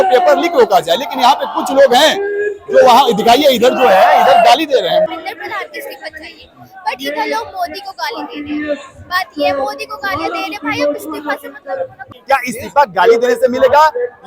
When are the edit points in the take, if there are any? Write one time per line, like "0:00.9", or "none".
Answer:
0:05.1
0:12.1